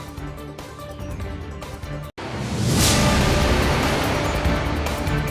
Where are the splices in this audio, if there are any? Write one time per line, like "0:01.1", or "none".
0:02.1